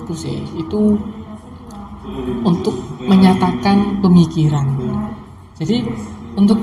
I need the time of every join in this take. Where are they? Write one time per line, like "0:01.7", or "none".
none